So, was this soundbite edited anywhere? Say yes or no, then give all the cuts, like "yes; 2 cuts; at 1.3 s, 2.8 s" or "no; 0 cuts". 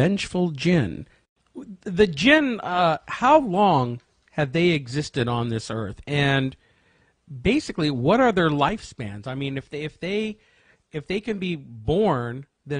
yes; 1 cut; at 11.7 s